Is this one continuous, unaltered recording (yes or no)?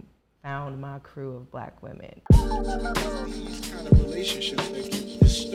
no